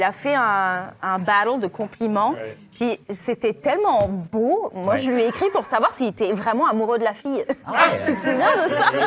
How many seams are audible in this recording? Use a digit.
0